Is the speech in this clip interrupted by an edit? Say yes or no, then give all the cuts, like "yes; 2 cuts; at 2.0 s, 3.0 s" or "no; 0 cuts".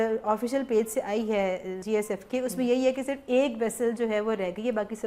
yes; 1 cut; at 1.7 s